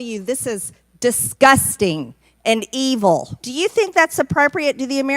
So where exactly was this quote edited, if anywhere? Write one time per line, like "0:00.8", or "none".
0:03.4